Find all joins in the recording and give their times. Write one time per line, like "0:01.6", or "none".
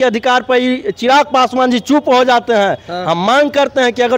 none